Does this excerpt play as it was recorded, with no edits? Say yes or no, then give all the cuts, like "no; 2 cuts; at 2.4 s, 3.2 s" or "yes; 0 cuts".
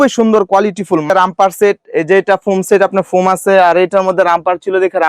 no; 1 cut; at 1.1 s